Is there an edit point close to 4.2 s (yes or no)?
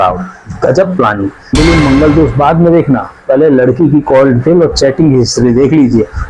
no